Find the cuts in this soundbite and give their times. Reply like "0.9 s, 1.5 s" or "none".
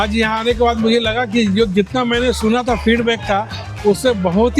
none